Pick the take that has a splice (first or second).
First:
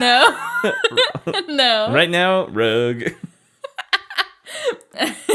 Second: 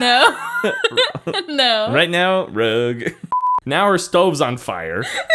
second